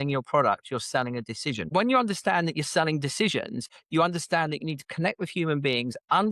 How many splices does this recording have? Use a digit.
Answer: 1